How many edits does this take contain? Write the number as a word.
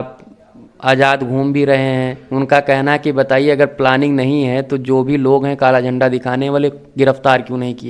zero